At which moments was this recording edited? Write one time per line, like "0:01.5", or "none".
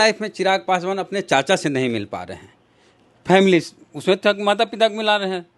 none